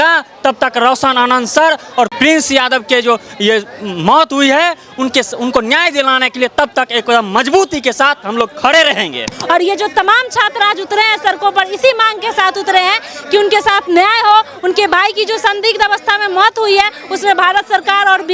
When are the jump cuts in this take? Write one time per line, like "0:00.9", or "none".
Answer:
0:02.1
0:09.3